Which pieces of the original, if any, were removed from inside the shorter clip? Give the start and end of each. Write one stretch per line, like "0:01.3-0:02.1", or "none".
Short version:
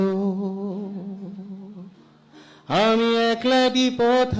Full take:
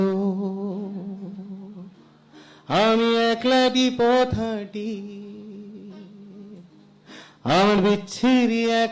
none

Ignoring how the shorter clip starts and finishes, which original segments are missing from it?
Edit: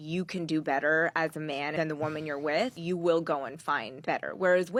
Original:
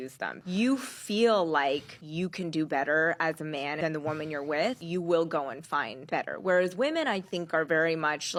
none

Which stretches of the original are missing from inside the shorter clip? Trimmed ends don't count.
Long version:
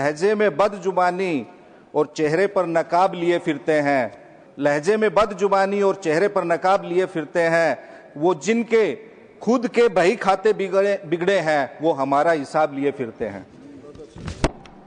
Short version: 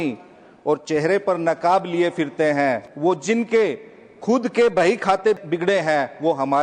0:04.2-0:08.1
0:10.6-0:11.0

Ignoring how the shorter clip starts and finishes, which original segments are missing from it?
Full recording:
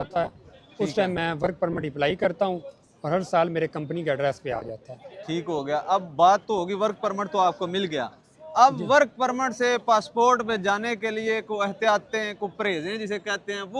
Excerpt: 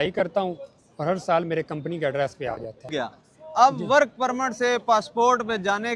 0:04.9-0:07.9

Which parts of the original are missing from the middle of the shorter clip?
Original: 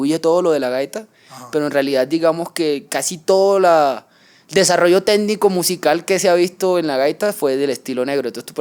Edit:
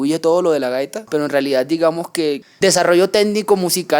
0:01.0-0:01.4
0:02.9-0:04.4

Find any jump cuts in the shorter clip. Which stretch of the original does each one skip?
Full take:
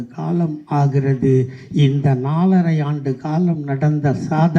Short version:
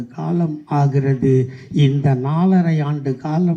none

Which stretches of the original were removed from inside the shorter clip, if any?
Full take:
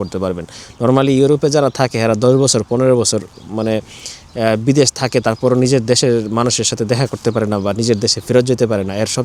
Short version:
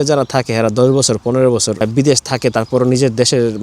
0:03.3-0:04.5

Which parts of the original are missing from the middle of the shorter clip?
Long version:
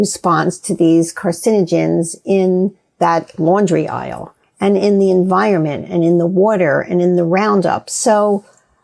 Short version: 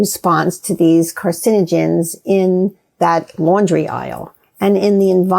none

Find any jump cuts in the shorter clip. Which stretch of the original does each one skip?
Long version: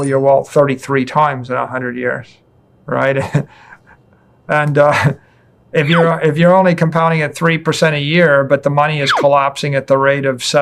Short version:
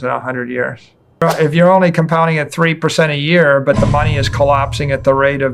0:02.7-0:06.1

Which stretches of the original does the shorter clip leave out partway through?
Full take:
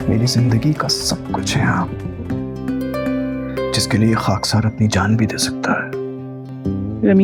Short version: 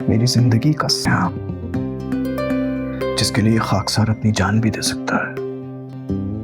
0:01.0-0:01.6

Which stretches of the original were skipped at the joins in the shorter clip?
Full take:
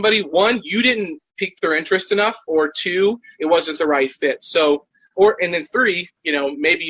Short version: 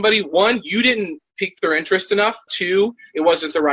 0:02.5-0:02.7

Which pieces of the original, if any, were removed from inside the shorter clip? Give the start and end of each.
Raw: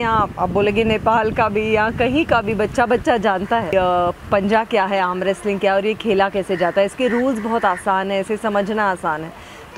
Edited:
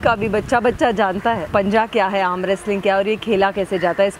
0:03.7-0:04.2

